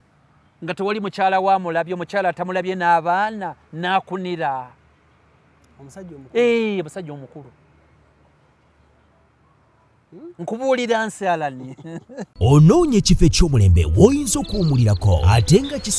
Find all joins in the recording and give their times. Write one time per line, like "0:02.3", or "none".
0:12.3